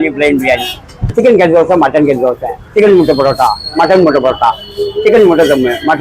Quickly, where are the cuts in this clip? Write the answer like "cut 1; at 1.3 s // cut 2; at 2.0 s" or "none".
cut 1; at 1.1 s